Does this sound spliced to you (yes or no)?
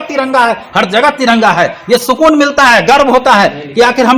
no